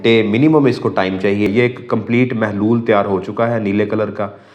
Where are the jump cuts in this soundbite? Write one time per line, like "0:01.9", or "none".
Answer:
0:01.5